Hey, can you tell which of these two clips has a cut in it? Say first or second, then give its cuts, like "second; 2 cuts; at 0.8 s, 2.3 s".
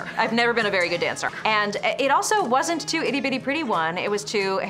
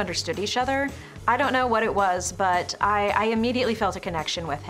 first; 1 cut; at 1.3 s